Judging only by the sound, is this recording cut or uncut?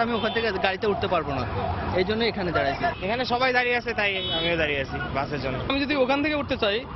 uncut